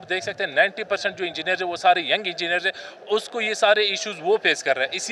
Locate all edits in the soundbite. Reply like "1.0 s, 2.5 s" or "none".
none